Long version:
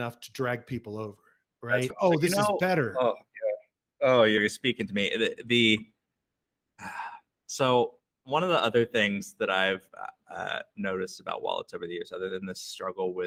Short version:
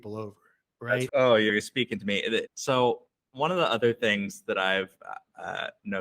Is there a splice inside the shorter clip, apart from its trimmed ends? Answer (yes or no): yes